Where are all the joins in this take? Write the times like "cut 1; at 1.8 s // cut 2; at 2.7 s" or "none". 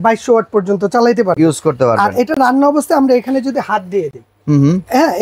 none